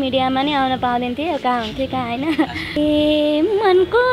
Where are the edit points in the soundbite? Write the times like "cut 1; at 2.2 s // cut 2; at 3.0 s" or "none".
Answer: cut 1; at 2.8 s